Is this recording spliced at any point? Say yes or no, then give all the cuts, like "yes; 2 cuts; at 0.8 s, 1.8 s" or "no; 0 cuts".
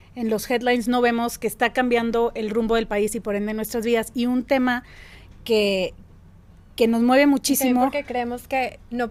no; 0 cuts